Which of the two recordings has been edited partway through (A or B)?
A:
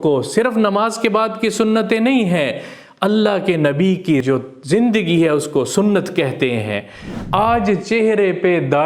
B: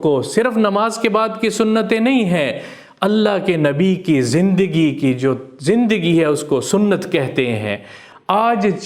A